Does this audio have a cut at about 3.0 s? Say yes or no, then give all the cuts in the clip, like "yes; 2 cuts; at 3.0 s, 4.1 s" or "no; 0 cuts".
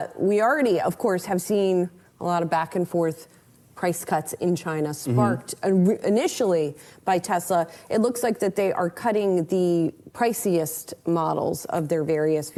no; 0 cuts